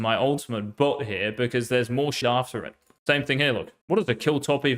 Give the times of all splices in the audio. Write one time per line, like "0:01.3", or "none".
0:02.3
0:03.7